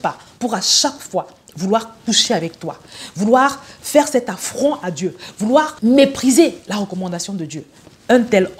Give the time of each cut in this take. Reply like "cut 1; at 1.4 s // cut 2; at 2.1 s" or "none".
cut 1; at 5.7 s